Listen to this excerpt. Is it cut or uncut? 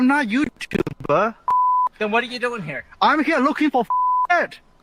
uncut